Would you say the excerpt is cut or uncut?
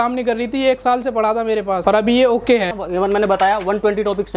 cut